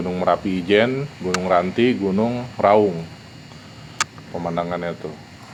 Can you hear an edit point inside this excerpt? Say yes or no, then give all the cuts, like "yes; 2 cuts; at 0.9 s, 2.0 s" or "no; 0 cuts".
no; 0 cuts